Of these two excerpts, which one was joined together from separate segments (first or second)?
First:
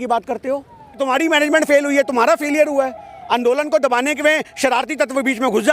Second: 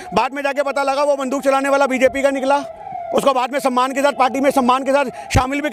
first